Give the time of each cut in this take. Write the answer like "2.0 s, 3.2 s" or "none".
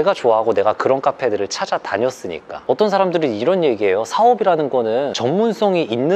2.5 s